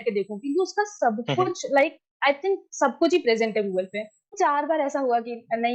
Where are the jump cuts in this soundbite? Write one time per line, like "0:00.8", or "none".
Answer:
0:04.4